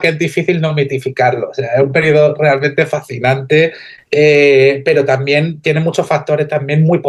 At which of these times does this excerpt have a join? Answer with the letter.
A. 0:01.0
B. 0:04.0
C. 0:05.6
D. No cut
D